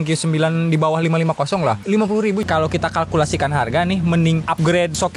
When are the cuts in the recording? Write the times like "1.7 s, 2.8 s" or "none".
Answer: 2.5 s